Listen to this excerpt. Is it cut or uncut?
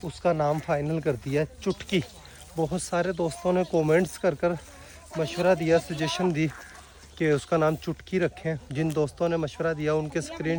uncut